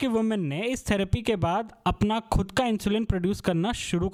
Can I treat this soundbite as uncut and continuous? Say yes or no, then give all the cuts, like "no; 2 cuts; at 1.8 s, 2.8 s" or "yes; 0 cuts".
yes; 0 cuts